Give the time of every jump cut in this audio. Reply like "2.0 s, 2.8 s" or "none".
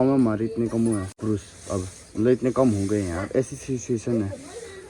1.1 s